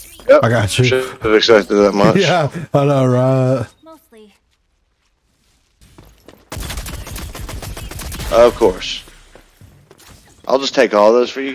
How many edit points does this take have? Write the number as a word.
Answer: one